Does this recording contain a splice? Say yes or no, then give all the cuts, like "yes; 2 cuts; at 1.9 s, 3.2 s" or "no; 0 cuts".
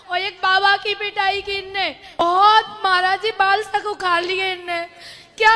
yes; 1 cut; at 2.2 s